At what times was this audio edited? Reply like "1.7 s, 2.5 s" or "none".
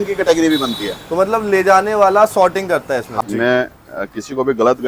3.1 s